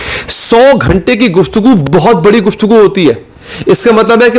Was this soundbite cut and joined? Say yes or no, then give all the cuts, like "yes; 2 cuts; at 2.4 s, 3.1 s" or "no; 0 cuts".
no; 0 cuts